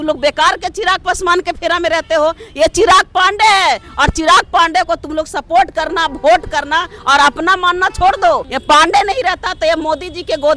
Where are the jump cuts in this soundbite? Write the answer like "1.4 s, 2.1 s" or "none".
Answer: 8.5 s